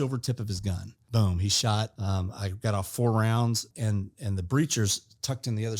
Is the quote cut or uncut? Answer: cut